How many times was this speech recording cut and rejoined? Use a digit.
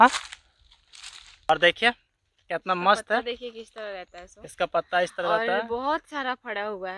1